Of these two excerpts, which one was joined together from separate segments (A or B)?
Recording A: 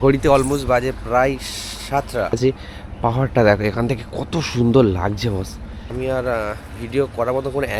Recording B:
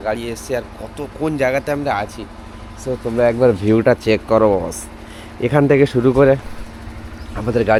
A